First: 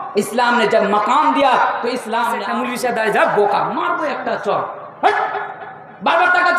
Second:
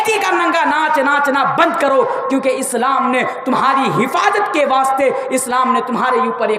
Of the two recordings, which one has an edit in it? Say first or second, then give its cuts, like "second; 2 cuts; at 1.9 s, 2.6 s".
first; 1 cut; at 2.4 s